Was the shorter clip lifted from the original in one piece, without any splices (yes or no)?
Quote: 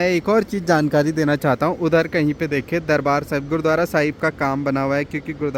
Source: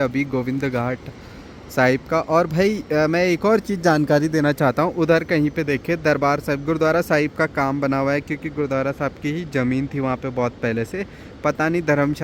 yes